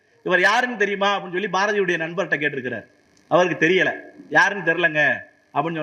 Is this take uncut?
yes; 0 cuts

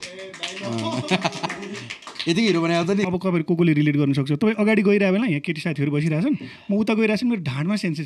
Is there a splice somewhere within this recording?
yes; 1 cut; at 3.0 s

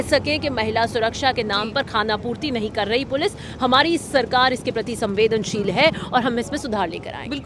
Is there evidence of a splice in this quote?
no; 0 cuts

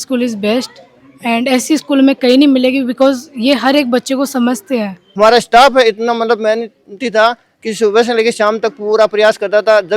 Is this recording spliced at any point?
yes; 1 cut; at 5.0 s

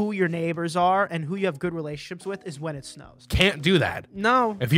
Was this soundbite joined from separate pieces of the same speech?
yes; 1 cut; at 3.2 s

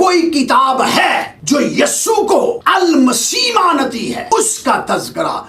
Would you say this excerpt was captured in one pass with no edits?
no; 3 cuts; at 1.3 s, 2.6 s, 4.3 s

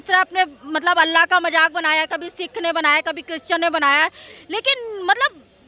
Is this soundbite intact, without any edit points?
yes; 0 cuts

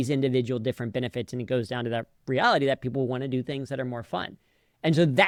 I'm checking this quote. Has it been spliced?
no; 0 cuts

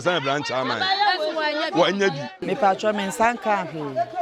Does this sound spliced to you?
yes; 1 cut; at 2.4 s

